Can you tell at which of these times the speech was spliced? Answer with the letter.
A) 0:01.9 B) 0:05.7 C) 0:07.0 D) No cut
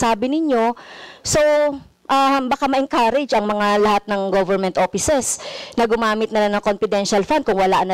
D